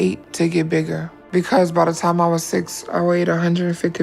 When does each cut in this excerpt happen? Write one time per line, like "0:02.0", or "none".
none